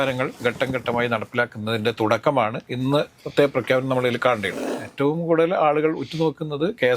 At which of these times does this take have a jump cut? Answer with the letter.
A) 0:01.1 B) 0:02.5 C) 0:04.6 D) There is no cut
C